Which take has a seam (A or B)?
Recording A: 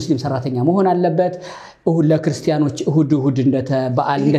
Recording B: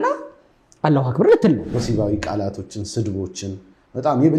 B